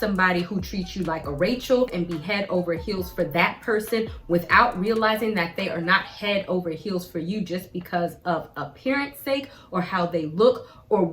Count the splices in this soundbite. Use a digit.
0